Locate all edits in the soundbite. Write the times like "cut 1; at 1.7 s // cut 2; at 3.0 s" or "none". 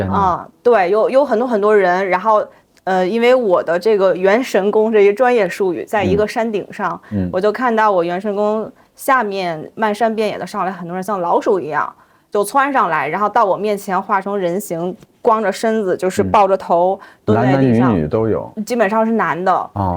none